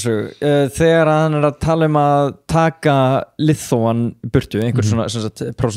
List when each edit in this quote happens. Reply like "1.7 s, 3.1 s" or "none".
none